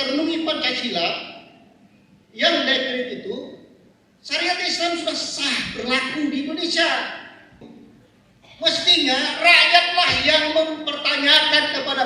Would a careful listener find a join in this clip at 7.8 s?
yes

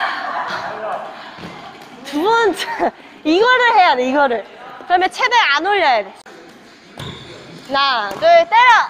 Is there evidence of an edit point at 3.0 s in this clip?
no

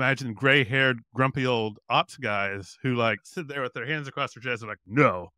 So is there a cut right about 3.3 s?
yes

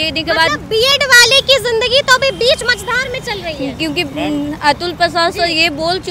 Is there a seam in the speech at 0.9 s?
no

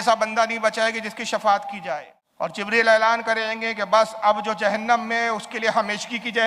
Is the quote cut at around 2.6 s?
yes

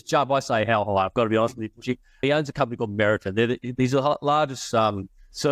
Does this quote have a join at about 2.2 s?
yes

